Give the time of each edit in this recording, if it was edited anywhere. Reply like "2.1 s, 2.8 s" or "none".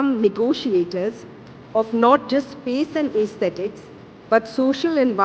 none